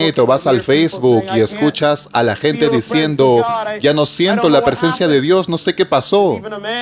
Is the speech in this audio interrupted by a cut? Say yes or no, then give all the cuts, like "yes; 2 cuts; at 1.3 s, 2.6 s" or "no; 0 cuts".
no; 0 cuts